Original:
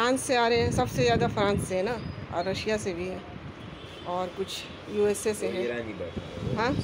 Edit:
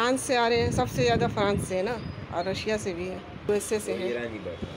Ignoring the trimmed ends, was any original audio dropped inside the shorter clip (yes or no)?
yes